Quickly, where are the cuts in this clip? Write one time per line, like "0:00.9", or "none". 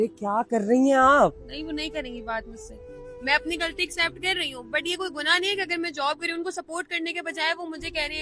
0:03.0